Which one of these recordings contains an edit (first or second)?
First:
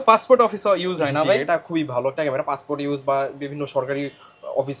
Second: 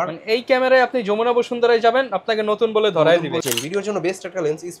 second